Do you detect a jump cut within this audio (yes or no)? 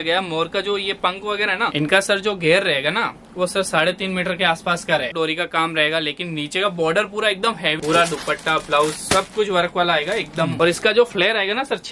yes